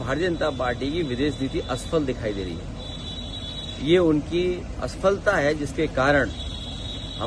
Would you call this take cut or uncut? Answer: uncut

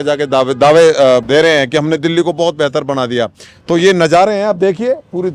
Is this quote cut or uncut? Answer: cut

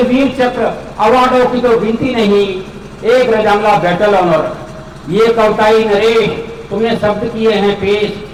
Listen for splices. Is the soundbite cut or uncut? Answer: uncut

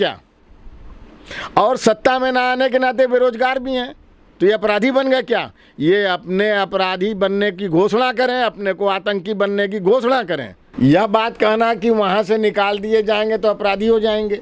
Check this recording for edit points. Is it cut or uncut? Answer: cut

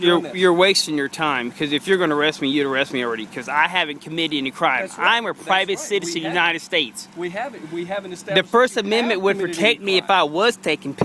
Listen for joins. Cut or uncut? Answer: uncut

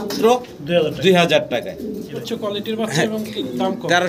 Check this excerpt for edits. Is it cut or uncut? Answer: cut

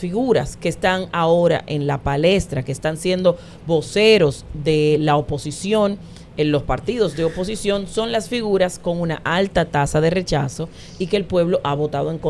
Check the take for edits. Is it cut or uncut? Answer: uncut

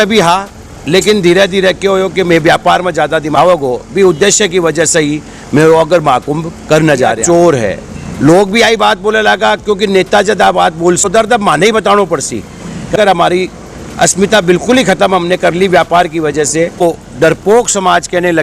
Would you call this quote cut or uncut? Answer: cut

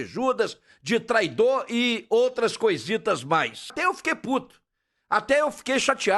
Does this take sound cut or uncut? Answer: cut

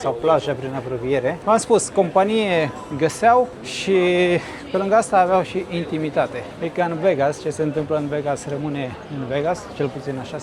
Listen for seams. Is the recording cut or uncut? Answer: uncut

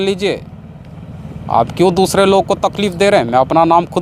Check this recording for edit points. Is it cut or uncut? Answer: uncut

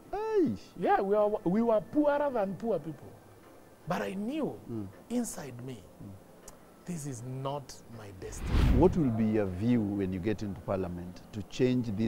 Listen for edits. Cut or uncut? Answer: cut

